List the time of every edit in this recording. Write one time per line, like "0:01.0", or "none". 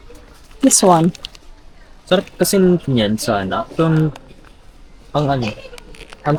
none